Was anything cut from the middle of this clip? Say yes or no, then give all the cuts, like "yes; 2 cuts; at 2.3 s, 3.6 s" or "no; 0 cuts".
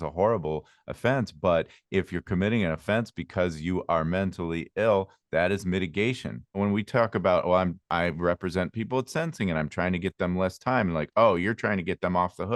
yes; 1 cut; at 6.6 s